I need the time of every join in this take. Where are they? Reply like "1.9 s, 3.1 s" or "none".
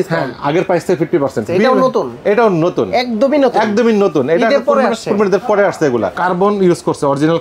1.5 s, 6.1 s